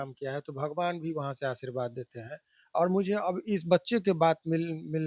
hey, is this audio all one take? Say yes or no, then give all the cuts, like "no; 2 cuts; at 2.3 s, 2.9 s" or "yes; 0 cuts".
yes; 0 cuts